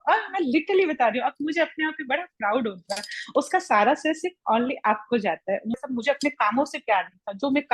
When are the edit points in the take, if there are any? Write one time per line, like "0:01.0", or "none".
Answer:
0:05.8

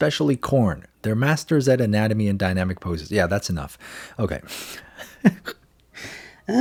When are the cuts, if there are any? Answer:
none

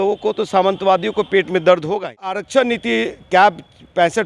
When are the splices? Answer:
0:02.4

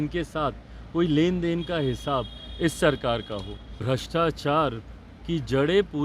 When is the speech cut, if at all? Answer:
0:03.8

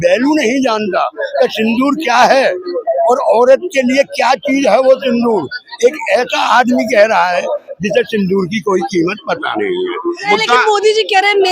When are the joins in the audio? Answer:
0:10.2

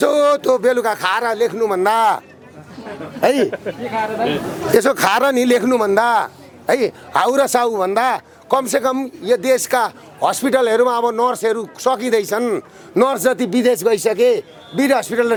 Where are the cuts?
none

